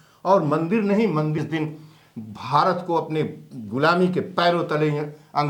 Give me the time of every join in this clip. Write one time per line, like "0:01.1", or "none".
0:01.3